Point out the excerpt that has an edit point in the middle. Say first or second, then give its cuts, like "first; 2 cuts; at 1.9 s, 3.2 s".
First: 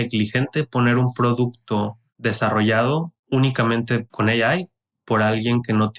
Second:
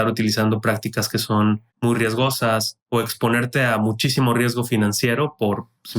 second; 2 cuts; at 1.7 s, 2.7 s